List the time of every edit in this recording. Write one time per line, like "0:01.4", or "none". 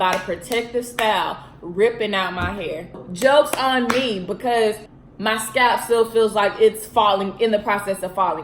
0:03.0
0:04.9